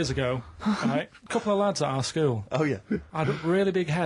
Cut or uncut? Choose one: cut